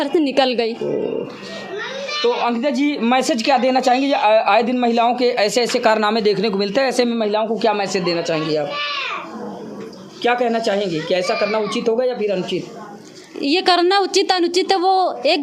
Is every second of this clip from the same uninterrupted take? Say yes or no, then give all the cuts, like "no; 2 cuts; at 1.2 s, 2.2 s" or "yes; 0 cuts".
yes; 0 cuts